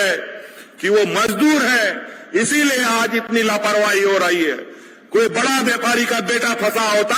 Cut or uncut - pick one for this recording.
uncut